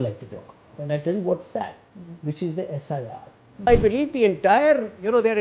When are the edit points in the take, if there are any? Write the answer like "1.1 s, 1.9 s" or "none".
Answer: 3.7 s

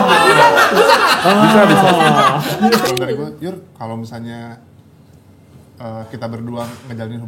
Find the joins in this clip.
2.9 s

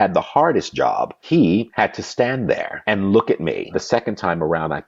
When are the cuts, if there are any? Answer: 1.4 s, 2.7 s, 3.8 s

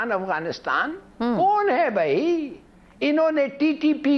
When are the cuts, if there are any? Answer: none

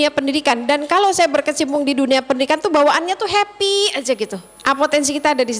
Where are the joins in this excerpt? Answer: 4.5 s

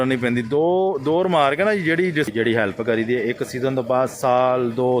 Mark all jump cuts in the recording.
2.3 s

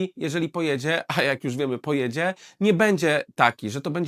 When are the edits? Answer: none

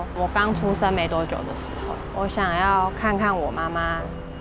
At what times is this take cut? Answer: 2.0 s

